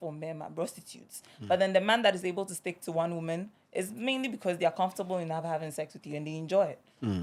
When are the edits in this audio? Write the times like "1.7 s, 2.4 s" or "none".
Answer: none